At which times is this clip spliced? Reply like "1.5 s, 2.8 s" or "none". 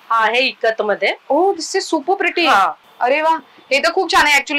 2.8 s